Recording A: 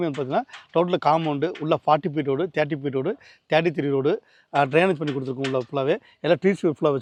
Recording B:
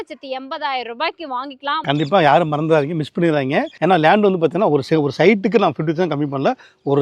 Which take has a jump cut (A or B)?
B